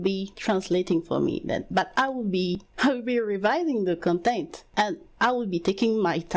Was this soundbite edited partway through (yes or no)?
yes